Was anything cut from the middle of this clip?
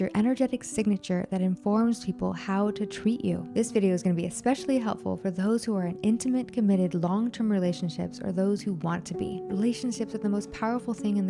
yes; 1 cut; at 3.4 s

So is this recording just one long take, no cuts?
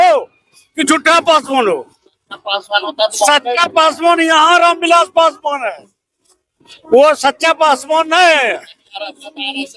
yes; 0 cuts

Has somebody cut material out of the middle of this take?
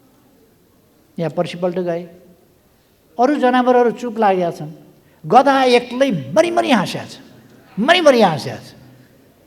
no; 0 cuts

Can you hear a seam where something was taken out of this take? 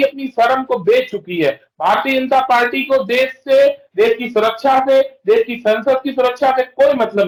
no; 0 cuts

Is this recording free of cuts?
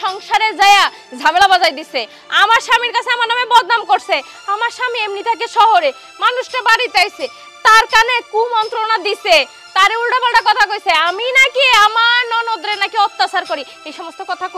yes; 0 cuts

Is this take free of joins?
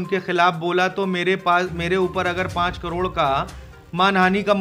yes; 0 cuts

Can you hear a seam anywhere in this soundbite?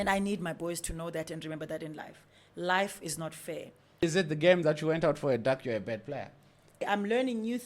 yes; 2 cuts; at 4.0 s, 6.8 s

